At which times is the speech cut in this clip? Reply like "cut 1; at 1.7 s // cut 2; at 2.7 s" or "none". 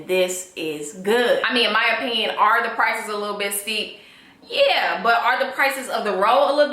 cut 1; at 1.5 s